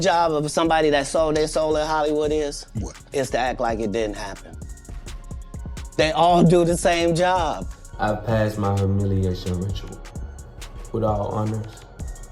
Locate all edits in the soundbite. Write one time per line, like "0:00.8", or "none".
0:07.7

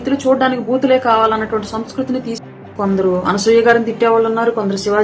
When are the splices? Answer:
0:02.5

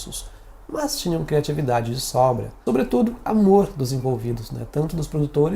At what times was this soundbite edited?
0:02.5

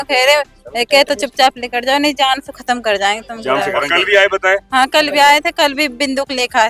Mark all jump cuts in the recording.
0:03.8

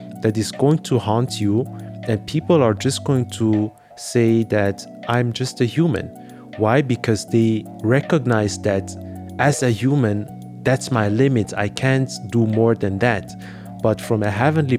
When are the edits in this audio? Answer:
none

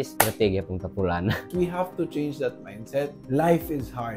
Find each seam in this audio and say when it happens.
0:01.5
0:03.2

